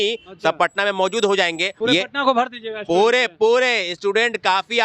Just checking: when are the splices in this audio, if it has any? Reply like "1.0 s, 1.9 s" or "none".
1.7 s